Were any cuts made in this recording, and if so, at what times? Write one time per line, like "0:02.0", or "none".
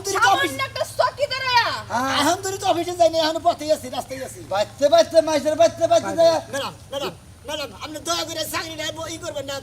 none